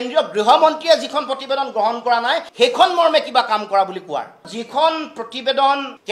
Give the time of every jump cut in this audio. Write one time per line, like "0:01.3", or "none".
0:04.4

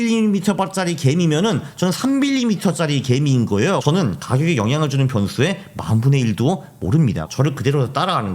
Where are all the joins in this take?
0:03.8
0:07.2

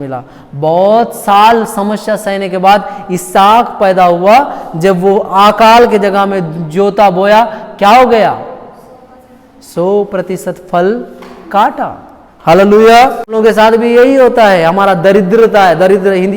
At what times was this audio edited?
0:13.3

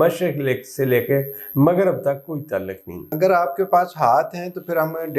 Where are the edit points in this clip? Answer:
0:03.1

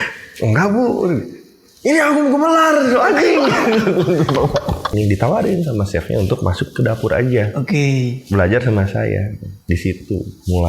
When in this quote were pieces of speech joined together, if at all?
0:04.9

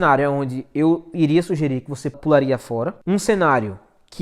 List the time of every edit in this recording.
0:02.2
0:03.0

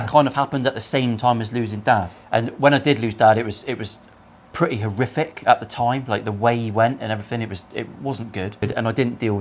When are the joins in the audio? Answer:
0:02.2
0:08.6

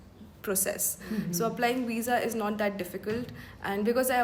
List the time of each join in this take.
none

